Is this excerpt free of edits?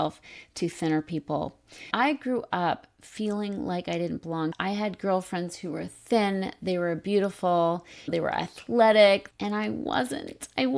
no; 2 cuts; at 8.1 s, 9.3 s

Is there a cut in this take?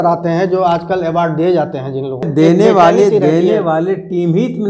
yes; 1 cut; at 2.3 s

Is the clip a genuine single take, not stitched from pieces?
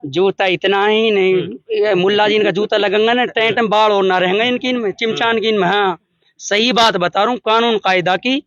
yes; 0 cuts

